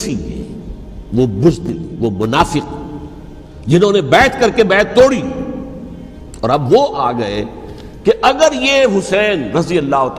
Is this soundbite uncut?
yes; 0 cuts

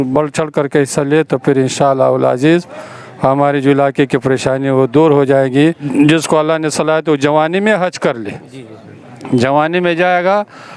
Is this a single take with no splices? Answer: no; 1 cut; at 5.8 s

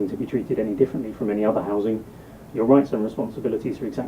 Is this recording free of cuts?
yes; 0 cuts

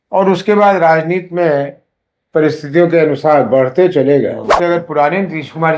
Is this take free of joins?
no; 1 cut; at 4.5 s

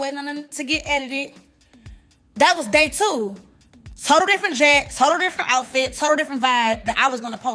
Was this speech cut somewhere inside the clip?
no; 0 cuts

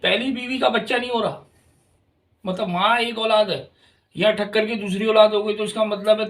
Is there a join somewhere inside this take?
no; 0 cuts

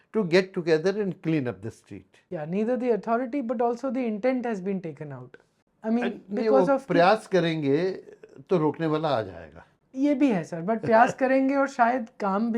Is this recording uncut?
yes; 0 cuts

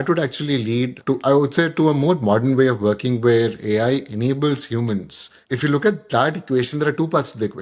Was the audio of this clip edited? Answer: no; 0 cuts

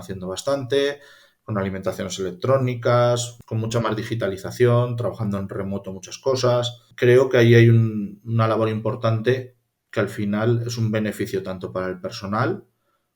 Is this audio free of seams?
no; 2 cuts; at 3.4 s, 6.8 s

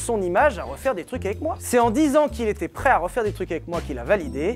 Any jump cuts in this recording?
no; 0 cuts

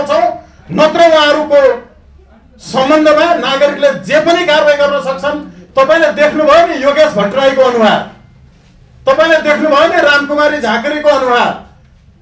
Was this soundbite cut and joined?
yes; 1 cut; at 5.5 s

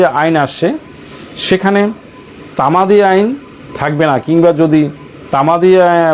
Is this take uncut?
yes; 0 cuts

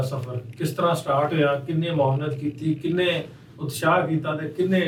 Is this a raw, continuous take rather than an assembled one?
yes; 0 cuts

